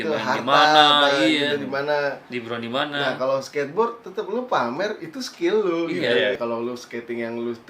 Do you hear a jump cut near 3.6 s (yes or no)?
no